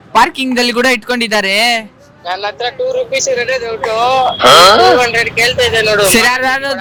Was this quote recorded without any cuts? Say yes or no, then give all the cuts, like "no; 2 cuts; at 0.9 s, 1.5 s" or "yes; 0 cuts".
yes; 0 cuts